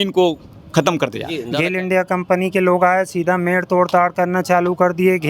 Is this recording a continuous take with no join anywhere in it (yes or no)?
no